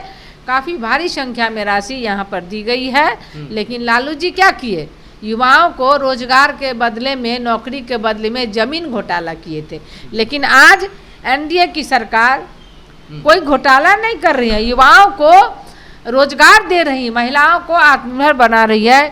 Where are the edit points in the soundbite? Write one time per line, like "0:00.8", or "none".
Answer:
none